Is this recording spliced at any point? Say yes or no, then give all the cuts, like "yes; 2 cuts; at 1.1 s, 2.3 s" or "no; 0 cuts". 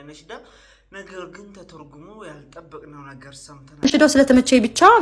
yes; 1 cut; at 3.8 s